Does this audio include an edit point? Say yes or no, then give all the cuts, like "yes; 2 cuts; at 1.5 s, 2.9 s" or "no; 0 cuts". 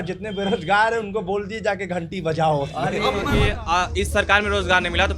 yes; 1 cut; at 3.3 s